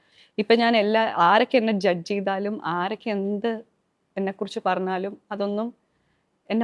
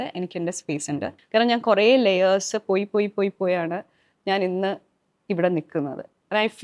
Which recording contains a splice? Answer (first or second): second